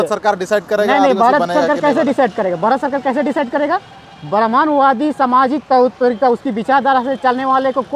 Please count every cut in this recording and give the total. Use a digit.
0